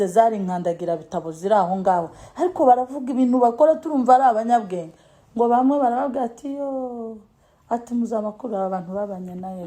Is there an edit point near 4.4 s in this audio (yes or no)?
no